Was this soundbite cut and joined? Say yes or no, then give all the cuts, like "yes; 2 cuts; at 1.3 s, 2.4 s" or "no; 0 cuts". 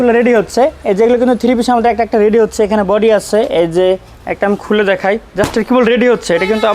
no; 0 cuts